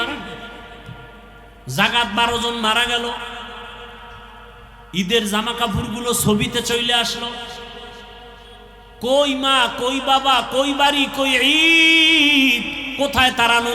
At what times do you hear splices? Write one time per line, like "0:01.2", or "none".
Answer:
0:01.4